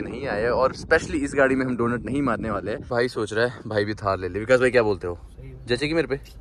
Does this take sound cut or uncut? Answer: cut